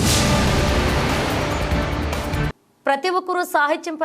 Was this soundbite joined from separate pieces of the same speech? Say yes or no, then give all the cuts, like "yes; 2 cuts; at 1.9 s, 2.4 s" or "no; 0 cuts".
no; 0 cuts